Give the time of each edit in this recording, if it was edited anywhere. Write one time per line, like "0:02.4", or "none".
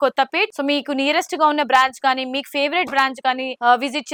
none